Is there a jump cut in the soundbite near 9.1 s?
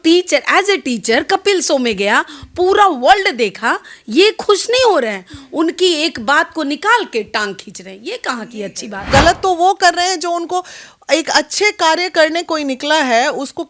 yes; 1 cut; at 9.1 s

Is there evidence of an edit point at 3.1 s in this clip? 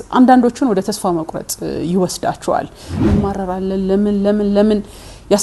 yes; 1 cut; at 3.1 s

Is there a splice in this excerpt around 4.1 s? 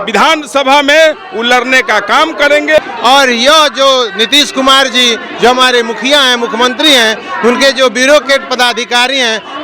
no; 1 cut; at 2.8 s

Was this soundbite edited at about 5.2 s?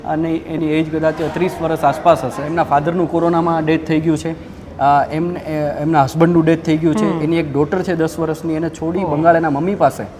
no; 1 cut; at 2.4 s

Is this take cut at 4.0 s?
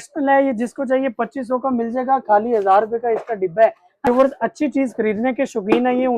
yes; 1 cut; at 4.0 s

